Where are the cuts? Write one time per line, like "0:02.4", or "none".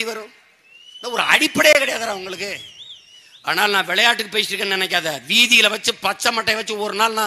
none